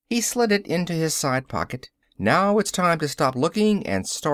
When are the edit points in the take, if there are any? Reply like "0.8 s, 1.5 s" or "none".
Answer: 2.5 s